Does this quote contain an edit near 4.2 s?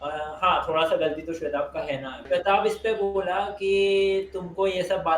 no; 1 cut; at 2.1 s

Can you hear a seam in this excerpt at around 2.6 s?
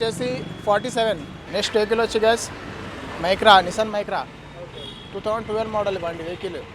no; 1 cut; at 1.3 s

